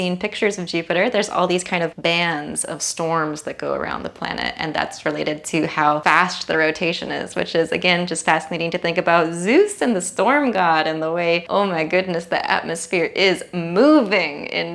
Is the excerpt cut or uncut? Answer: cut